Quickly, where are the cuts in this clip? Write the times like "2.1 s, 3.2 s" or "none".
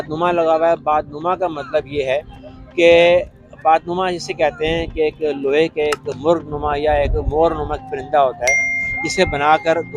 none